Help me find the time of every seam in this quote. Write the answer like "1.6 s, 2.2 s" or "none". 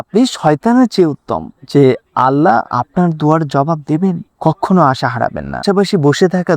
5.6 s